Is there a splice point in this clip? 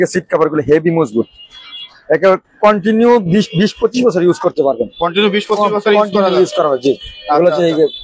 no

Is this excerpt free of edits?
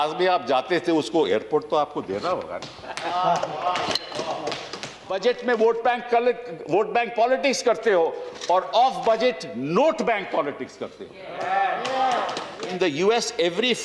no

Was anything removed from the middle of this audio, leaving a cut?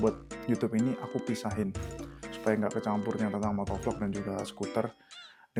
no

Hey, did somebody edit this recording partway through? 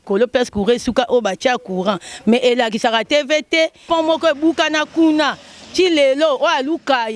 yes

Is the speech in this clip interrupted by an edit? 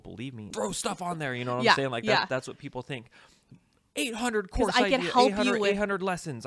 no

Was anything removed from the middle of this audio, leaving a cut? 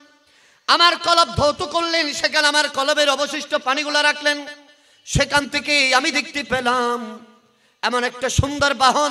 no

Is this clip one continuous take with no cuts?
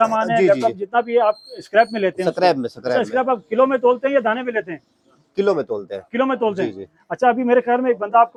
yes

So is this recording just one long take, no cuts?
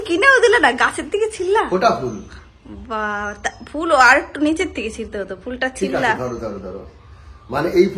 yes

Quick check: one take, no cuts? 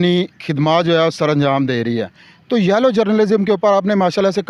yes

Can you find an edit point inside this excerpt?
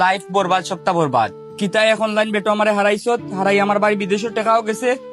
no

